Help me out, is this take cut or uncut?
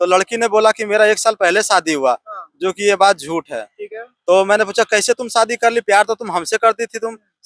uncut